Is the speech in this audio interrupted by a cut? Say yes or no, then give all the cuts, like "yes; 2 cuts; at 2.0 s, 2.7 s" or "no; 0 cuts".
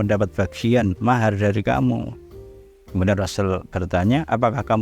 no; 0 cuts